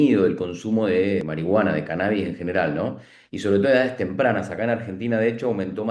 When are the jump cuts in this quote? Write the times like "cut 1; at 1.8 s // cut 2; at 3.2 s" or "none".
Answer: cut 1; at 1.3 s